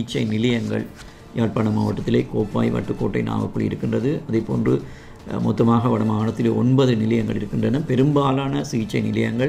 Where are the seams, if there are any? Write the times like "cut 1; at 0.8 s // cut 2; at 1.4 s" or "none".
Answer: none